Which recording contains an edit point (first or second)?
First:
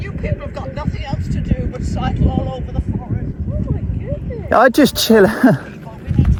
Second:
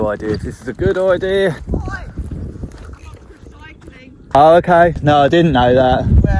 second